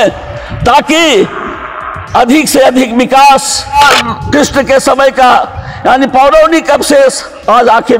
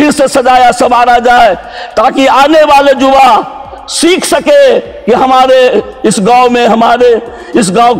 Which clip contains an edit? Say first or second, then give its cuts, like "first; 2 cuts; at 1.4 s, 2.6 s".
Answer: first; 1 cut; at 3.8 s